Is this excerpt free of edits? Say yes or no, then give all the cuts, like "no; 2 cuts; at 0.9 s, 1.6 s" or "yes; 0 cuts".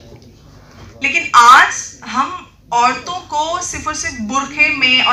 yes; 0 cuts